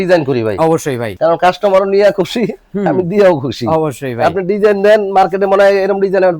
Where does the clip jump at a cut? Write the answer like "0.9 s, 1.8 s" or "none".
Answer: none